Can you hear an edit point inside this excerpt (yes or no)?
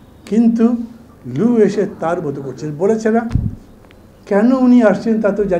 no